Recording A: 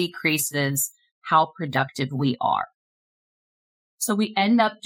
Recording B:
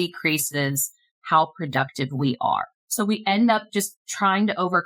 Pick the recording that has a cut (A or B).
B